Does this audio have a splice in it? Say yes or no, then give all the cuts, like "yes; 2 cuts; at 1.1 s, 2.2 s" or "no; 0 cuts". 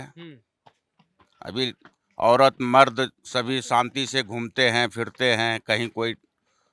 no; 0 cuts